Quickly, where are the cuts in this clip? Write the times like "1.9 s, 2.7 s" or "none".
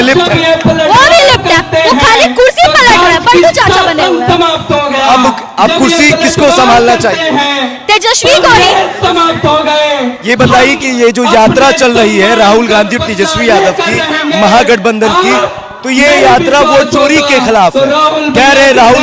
none